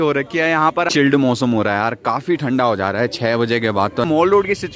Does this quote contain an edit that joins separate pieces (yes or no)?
yes